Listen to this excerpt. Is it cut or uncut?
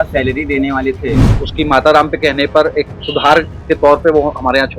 cut